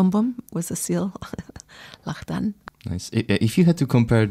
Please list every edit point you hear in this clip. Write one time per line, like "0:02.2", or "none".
0:02.7